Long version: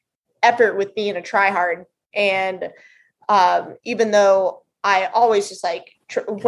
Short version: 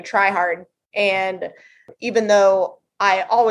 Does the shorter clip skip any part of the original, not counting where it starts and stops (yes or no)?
yes